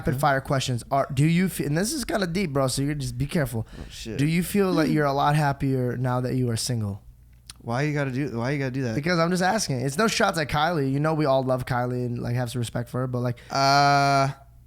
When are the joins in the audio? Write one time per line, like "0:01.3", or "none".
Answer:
0:13.4